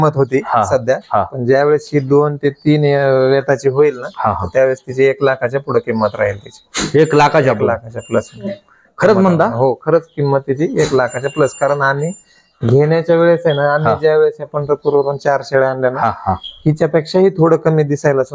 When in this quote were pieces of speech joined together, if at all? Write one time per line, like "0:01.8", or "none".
none